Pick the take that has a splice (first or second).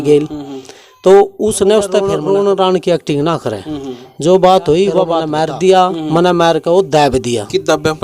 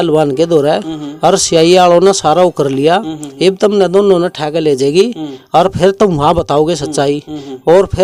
first